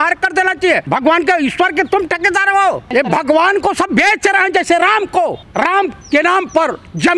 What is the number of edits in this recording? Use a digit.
2